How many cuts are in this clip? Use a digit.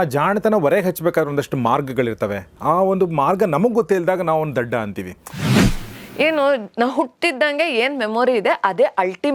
1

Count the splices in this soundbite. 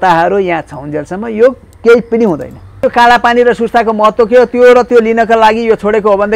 1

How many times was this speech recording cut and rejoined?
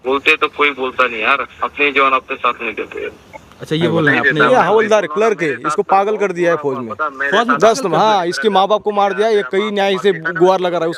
0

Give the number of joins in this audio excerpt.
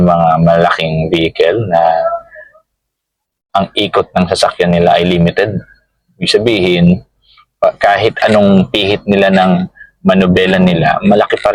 0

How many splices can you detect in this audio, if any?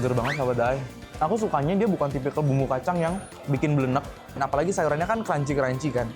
3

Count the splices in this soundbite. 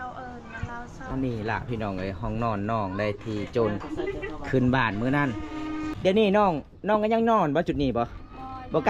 2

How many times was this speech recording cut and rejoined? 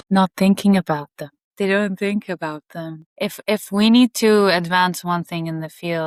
0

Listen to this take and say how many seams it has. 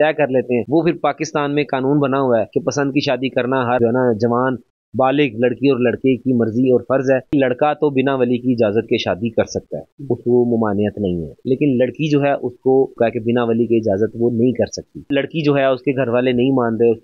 4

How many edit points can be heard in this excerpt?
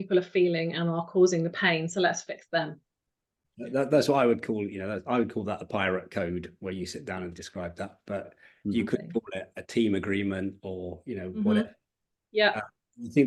0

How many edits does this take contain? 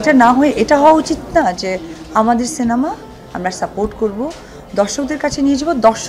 0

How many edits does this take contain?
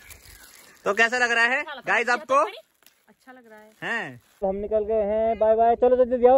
1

